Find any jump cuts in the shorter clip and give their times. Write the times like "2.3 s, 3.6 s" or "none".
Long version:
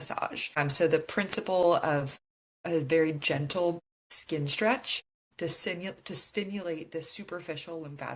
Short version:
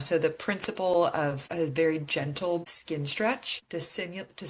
1.4 s, 2.7 s, 3.5 s

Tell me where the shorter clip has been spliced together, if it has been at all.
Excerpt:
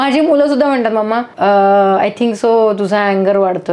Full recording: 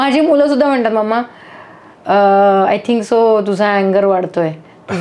1.3 s

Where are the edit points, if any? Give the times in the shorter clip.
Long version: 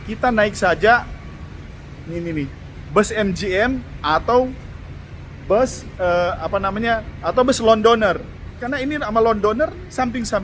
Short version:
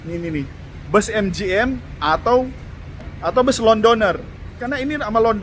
3.1 s

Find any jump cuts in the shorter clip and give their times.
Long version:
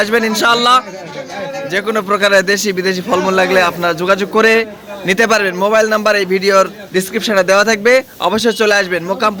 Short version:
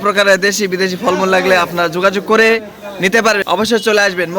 3.4 s

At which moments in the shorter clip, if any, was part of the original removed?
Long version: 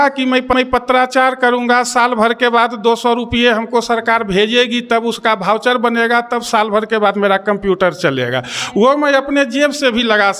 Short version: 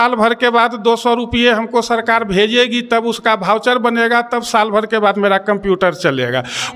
none

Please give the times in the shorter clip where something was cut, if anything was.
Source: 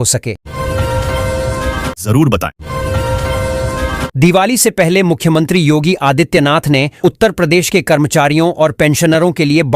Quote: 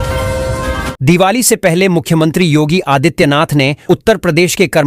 0.9 s

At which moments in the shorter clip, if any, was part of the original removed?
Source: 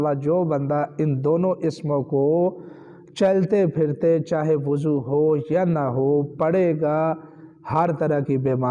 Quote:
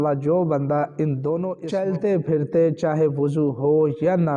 1.6 s

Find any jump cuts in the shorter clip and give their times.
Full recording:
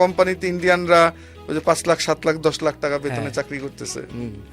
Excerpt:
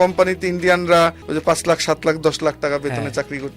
1.3 s

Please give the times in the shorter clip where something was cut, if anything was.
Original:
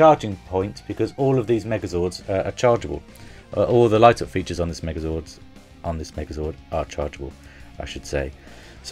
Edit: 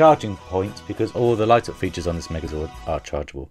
1.1 s, 2.5 s

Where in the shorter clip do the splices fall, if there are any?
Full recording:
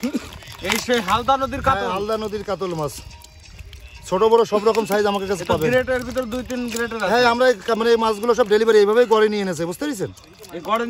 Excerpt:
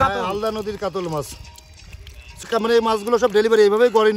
2.4 s

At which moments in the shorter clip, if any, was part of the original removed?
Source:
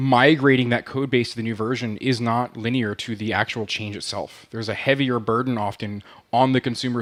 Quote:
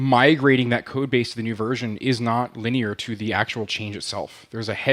none

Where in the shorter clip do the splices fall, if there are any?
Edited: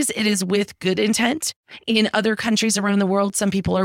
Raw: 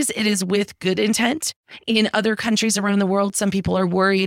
none

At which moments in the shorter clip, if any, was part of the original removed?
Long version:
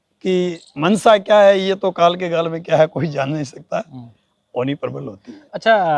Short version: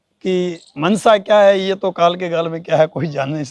none

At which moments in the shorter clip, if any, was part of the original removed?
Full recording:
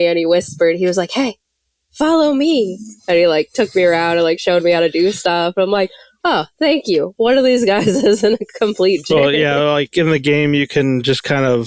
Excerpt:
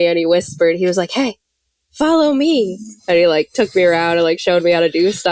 none

